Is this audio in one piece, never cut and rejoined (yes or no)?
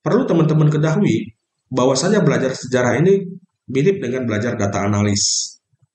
yes